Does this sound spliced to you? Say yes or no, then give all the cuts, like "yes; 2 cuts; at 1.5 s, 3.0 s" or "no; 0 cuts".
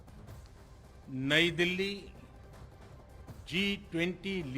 yes; 3 cuts; at 1.0 s, 2.0 s, 3.5 s